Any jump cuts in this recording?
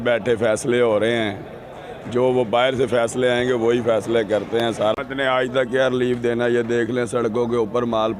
yes; 1 cut; at 5.0 s

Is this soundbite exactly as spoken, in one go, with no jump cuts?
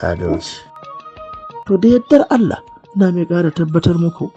no; 1 cut; at 1.0 s

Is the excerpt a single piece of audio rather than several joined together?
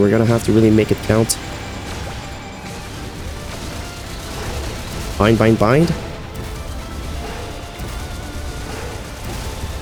yes; 0 cuts

